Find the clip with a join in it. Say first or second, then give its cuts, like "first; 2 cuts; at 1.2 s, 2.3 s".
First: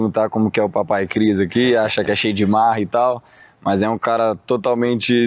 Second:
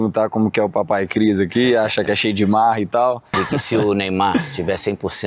second; 1 cut; at 3.4 s